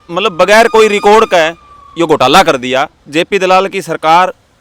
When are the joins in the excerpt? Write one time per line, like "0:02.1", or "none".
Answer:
0:02.9